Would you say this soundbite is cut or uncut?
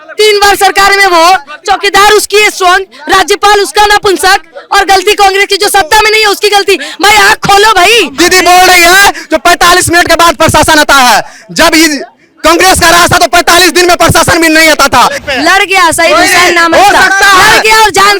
cut